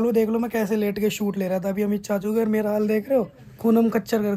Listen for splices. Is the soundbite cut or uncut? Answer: uncut